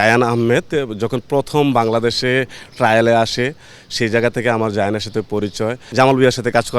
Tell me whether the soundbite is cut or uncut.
cut